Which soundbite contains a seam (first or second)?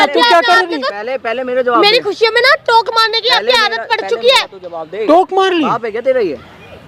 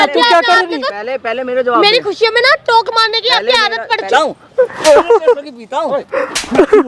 second